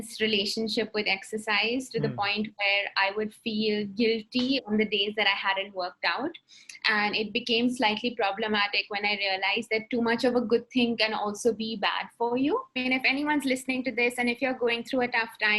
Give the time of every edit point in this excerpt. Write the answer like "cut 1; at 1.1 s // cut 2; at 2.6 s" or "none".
cut 1; at 12.7 s